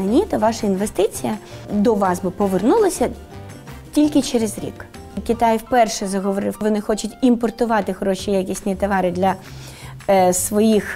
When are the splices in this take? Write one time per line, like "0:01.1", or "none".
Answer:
0:01.6
0:05.2
0:06.6